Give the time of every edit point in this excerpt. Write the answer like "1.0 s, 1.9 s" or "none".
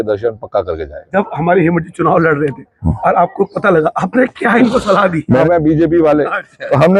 0.9 s, 5.4 s